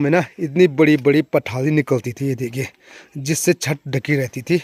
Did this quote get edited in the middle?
no; 0 cuts

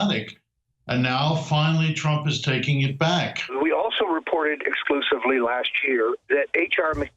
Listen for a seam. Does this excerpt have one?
yes; 1 cut; at 3.5 s

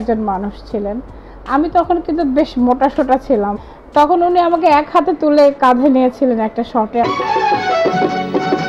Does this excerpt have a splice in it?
yes; 2 cuts; at 3.6 s, 7.0 s

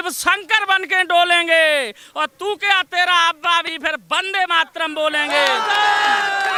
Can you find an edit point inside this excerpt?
no; 0 cuts

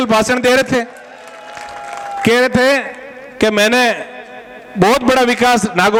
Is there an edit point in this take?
no; 0 cuts

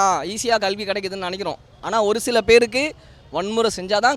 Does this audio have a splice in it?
no; 0 cuts

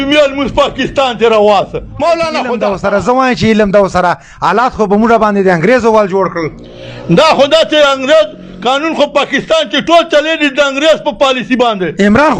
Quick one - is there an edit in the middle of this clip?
yes; 1 cut; at 2.5 s

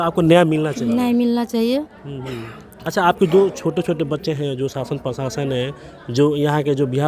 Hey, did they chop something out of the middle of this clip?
no; 0 cuts

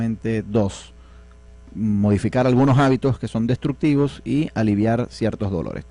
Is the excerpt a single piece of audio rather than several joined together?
no; 1 cut; at 3.0 s

